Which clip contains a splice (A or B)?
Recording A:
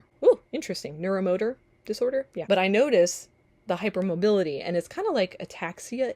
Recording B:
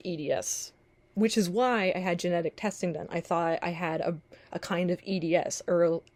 A